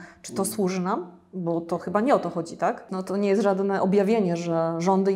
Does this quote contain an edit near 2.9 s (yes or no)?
yes